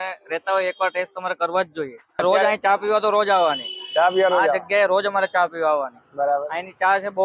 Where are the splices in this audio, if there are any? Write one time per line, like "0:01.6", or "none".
0:02.2